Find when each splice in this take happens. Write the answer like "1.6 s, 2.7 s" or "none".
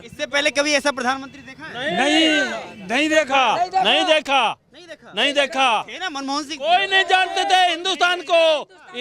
none